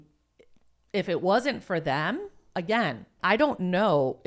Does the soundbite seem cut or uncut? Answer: cut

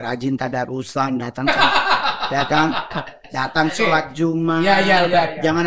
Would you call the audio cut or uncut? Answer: uncut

